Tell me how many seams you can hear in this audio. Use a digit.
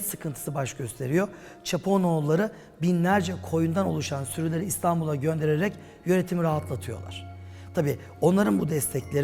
0